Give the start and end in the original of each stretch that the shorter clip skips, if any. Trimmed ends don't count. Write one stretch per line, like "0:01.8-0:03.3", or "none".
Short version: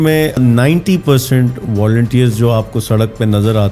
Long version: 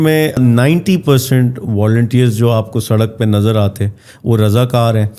none